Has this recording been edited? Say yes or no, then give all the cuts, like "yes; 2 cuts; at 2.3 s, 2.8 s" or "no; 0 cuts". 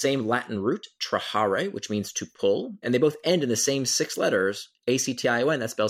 yes; 1 cut; at 2.8 s